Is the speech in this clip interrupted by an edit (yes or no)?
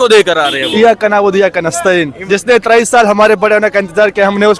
no